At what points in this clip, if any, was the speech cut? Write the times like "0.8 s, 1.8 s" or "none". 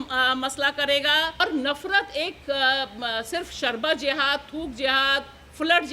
1.4 s

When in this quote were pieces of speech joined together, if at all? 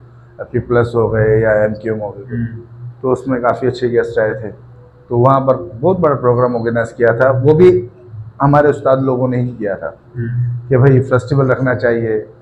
none

